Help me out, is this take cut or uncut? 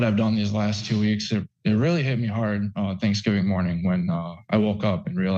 uncut